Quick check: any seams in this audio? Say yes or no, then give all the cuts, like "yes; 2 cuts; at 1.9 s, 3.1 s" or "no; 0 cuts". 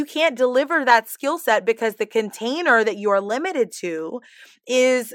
no; 0 cuts